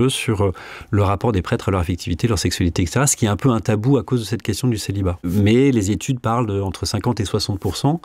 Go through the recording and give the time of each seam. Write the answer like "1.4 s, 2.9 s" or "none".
5.2 s